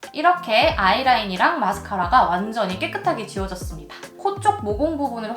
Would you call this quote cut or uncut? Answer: cut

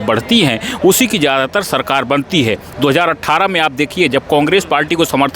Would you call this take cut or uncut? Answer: uncut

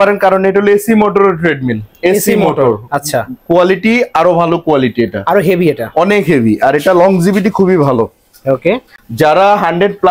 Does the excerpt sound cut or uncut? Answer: uncut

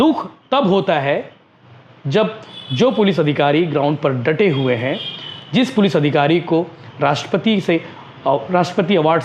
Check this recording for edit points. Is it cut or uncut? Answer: uncut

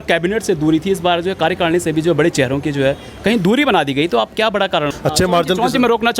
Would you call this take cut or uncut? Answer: cut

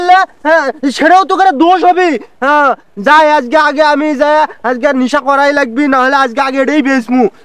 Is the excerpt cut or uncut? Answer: uncut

